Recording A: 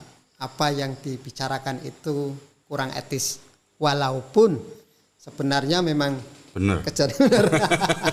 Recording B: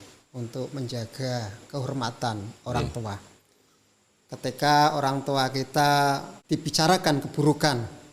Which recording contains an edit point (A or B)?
B